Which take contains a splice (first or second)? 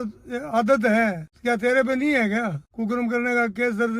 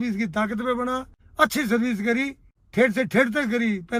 first